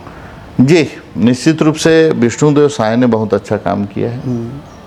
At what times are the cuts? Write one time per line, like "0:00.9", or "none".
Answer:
none